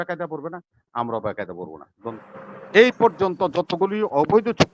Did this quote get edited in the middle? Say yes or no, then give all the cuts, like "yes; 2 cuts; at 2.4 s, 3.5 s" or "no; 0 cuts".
yes; 1 cut; at 2.1 s